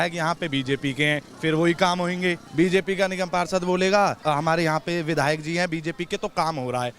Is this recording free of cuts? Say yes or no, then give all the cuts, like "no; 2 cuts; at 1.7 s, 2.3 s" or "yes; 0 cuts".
no; 2 cuts; at 2.4 s, 4.2 s